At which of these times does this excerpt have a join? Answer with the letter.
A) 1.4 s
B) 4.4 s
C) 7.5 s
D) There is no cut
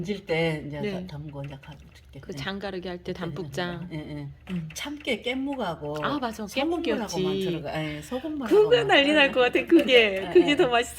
B